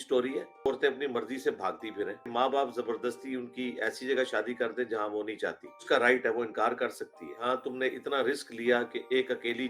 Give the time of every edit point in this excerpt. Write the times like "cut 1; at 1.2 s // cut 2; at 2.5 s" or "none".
cut 1; at 0.7 s // cut 2; at 2.3 s // cut 3; at 5.8 s // cut 4; at 7.4 s